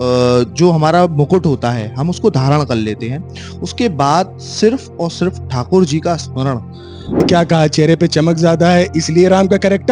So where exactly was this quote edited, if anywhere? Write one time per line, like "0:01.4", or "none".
0:07.2